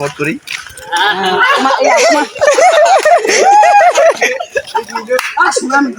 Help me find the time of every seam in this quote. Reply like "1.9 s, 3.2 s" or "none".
none